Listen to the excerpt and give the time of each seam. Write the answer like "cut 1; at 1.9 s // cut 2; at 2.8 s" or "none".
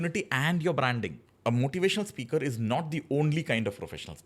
cut 1; at 1.2 s